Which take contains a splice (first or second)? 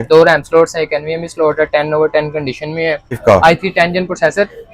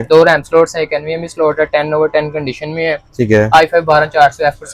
first